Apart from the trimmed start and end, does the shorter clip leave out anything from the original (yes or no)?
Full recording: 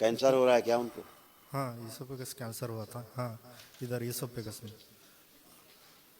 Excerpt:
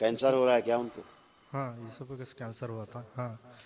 no